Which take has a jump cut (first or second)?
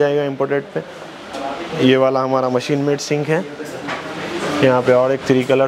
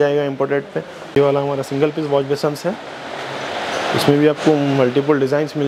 second